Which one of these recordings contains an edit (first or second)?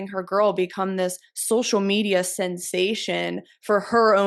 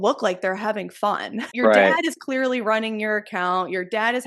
second